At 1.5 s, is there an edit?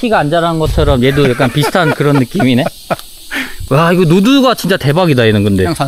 no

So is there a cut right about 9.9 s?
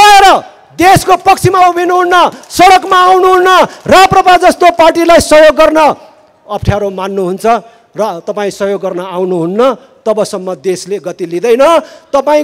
no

